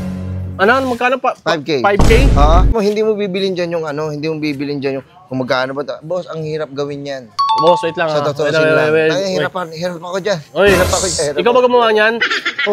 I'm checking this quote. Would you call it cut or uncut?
cut